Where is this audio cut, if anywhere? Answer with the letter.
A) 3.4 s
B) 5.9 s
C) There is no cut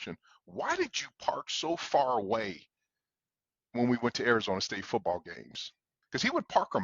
B